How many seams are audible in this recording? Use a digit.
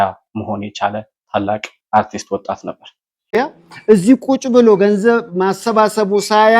1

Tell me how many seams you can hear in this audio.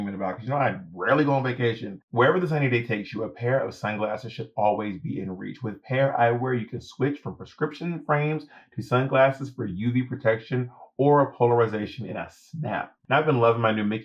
1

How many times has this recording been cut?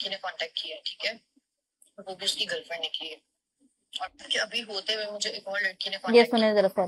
0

